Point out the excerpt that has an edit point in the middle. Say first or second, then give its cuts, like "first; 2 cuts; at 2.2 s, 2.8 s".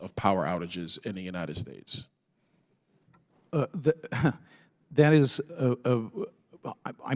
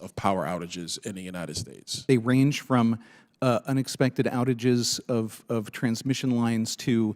second; 1 cut; at 2.0 s